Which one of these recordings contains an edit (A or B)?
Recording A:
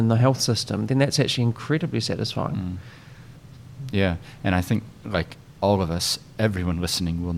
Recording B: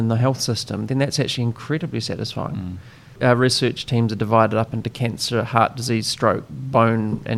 B